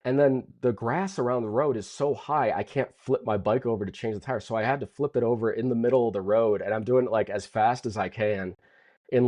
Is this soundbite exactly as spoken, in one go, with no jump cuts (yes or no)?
yes